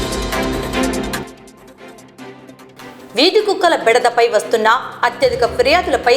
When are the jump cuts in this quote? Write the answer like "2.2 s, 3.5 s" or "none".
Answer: 1.2 s